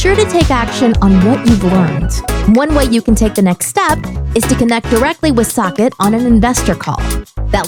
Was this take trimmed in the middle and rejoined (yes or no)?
no